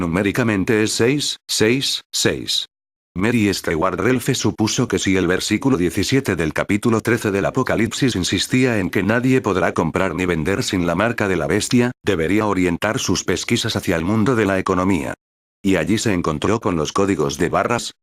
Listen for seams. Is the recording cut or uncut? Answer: cut